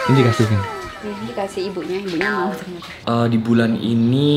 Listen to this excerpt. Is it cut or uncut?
cut